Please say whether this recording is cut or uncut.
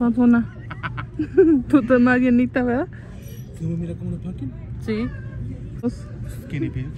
cut